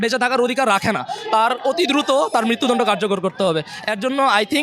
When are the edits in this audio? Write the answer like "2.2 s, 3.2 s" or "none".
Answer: none